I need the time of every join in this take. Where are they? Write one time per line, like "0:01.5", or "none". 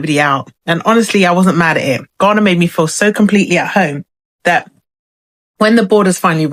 none